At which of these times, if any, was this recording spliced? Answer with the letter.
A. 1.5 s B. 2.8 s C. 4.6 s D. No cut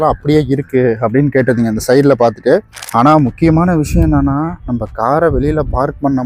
B